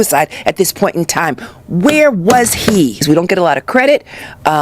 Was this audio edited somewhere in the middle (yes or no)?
yes